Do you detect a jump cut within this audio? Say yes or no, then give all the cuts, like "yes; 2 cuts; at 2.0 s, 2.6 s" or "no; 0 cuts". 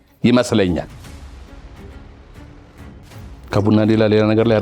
yes; 2 cuts; at 0.9 s, 3.0 s